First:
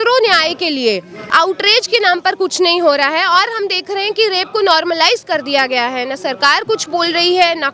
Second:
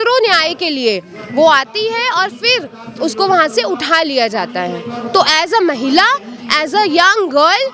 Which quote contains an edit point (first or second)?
first